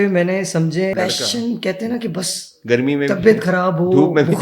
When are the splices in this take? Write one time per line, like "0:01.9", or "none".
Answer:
0:00.9

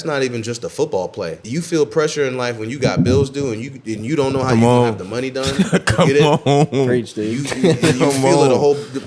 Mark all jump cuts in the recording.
0:01.4

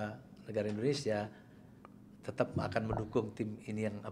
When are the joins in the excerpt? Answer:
none

